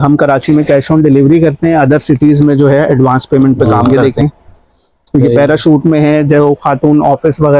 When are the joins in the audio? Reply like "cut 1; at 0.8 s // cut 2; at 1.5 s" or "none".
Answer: cut 1; at 3.8 s

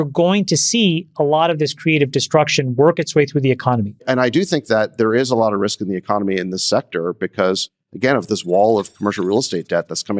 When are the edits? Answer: cut 1; at 3.9 s

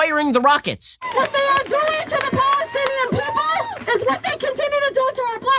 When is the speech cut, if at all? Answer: cut 1; at 1.1 s // cut 2; at 3.8 s

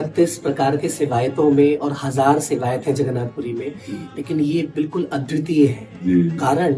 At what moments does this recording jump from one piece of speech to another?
none

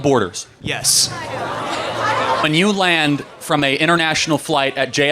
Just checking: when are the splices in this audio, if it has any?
cut 1; at 2.4 s

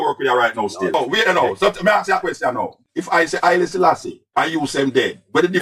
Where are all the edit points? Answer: cut 1; at 0.9 s

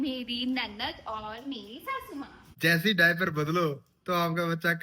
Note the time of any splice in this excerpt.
cut 1; at 2.5 s

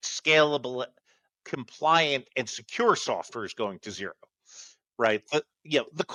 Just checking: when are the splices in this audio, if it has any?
none

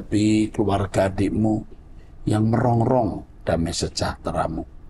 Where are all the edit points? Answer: none

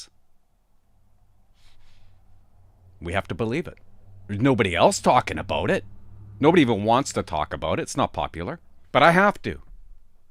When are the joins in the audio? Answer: cut 1; at 8.7 s

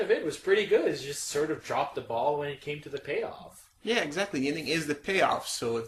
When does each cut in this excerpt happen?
cut 1; at 4.6 s

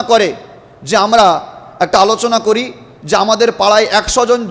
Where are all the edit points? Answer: none

